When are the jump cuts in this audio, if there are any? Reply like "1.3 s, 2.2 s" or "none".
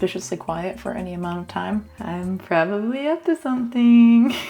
none